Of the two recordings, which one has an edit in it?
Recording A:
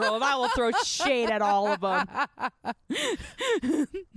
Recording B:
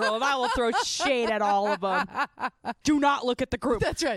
B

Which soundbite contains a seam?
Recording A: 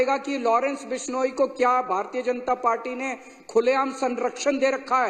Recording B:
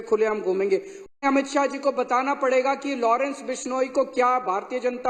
B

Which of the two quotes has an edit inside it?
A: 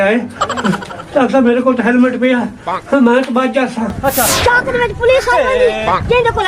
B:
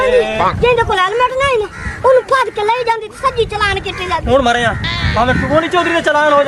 A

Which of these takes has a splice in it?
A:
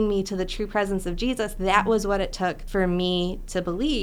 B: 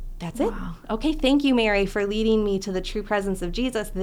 A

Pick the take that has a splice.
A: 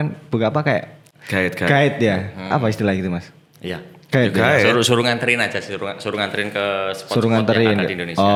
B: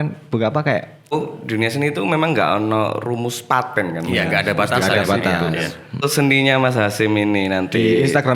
B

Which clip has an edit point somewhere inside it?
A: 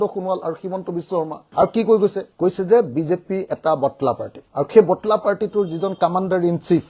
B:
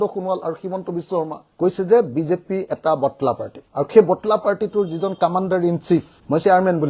B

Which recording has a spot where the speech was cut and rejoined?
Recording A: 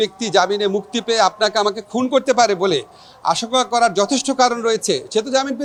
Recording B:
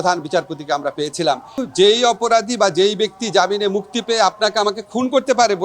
B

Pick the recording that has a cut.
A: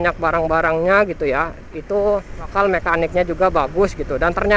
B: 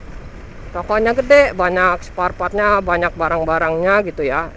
A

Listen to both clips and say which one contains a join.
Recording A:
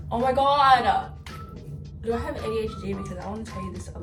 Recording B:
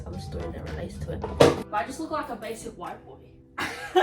B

